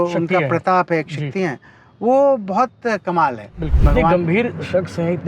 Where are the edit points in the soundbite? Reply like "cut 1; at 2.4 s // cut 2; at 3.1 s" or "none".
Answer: cut 1; at 3.7 s